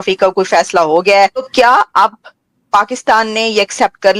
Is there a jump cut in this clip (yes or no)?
yes